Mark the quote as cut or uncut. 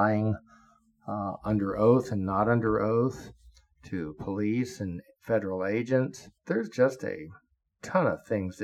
cut